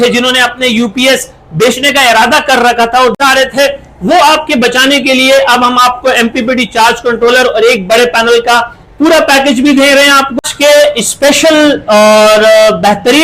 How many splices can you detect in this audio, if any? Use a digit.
2